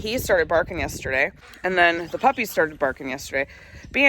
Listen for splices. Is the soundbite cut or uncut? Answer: cut